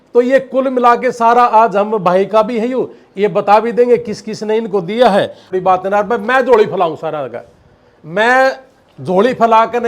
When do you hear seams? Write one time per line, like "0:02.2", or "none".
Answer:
0:05.4